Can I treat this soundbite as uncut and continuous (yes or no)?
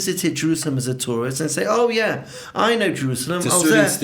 yes